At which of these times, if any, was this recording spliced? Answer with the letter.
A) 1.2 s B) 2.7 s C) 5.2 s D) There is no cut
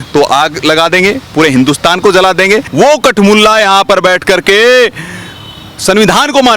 B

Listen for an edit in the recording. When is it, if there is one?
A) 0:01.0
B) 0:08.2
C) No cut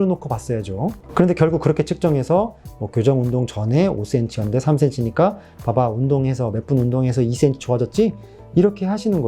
A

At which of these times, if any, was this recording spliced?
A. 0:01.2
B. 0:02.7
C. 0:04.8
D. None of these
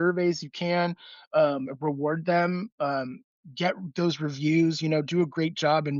D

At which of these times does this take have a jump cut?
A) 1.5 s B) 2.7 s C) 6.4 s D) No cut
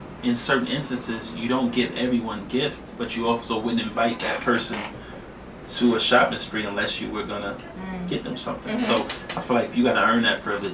A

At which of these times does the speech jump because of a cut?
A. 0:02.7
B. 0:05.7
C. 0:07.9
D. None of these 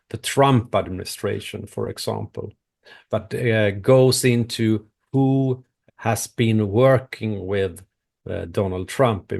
B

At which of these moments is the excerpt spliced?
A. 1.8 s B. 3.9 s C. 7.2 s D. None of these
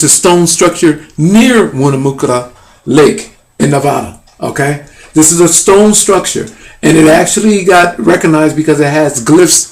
A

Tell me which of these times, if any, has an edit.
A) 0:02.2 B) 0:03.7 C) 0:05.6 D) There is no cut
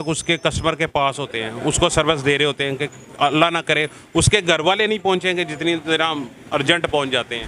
D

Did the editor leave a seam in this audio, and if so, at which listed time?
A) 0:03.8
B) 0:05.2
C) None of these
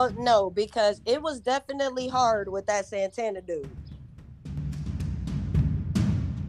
A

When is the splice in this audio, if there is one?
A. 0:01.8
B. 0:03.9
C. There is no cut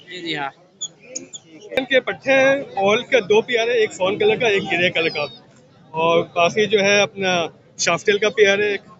A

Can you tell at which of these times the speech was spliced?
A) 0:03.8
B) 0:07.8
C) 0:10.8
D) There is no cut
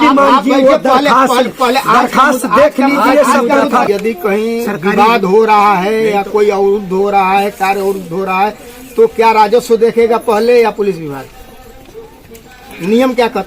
A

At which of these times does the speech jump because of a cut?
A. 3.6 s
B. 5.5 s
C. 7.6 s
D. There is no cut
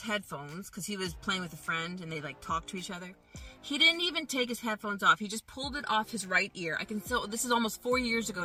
D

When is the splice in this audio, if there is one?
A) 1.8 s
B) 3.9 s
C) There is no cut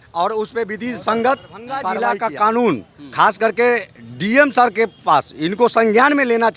A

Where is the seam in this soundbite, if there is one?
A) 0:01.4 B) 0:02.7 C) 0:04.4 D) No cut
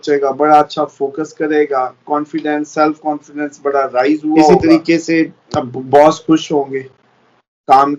C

